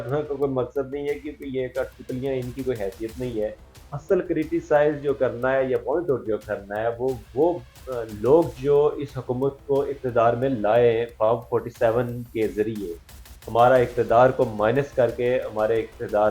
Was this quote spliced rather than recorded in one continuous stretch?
no; 0 cuts

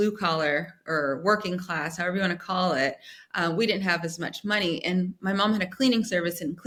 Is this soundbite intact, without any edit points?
yes; 0 cuts

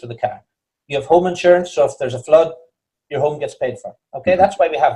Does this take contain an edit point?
no; 0 cuts

